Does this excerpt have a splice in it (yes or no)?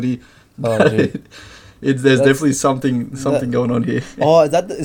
no